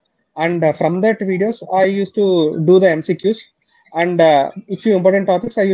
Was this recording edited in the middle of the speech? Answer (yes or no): no